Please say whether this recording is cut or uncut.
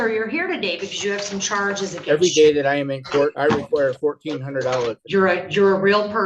cut